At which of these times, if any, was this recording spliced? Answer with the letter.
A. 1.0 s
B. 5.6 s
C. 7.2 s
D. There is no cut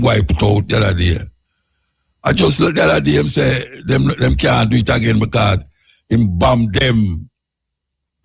D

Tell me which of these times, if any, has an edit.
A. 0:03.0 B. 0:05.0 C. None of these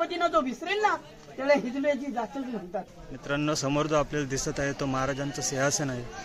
A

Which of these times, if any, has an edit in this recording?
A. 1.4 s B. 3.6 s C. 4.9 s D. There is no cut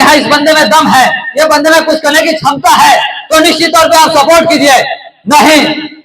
D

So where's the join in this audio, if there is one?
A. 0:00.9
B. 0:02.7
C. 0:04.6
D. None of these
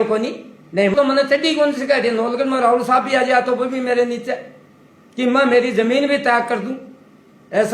A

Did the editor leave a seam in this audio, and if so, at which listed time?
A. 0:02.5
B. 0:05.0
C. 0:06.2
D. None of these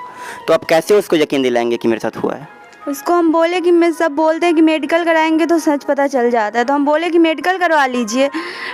D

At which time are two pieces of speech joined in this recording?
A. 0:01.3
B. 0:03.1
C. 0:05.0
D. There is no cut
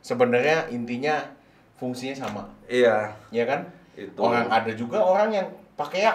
D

